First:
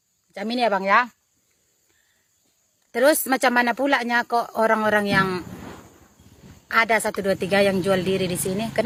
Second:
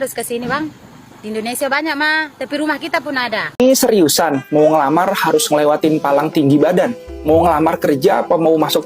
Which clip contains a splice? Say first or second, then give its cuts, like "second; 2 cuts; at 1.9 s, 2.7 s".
second; 1 cut; at 3.6 s